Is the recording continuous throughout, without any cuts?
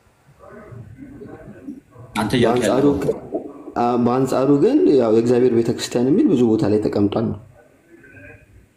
yes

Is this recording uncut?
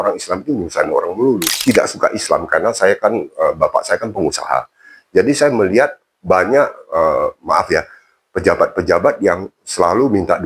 no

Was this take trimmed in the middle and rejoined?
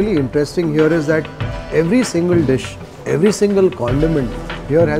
no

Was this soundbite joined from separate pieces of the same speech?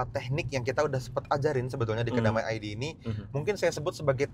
no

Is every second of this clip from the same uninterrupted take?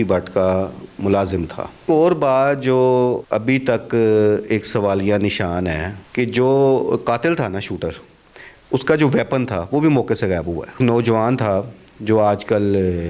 no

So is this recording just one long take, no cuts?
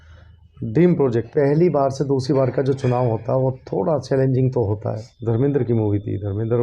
no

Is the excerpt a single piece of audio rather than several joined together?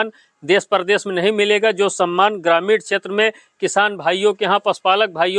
yes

